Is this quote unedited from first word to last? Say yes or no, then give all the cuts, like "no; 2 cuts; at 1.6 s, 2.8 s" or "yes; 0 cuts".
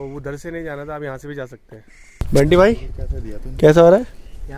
no; 1 cut; at 2.2 s